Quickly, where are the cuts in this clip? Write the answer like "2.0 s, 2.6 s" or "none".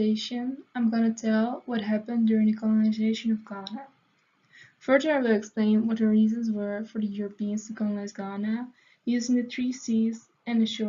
none